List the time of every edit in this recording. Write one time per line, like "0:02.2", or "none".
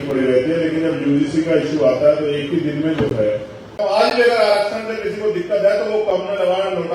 0:03.7